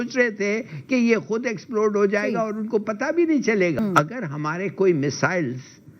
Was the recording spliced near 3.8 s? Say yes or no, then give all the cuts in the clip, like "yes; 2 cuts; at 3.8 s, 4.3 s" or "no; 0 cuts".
yes; 1 cut; at 3.8 s